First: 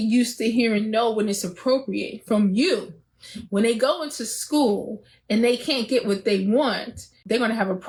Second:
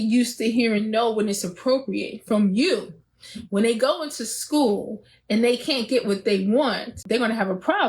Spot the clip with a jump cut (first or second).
second